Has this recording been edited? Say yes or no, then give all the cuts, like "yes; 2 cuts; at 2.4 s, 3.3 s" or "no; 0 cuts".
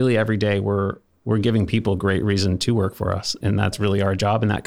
yes; 1 cut; at 3.7 s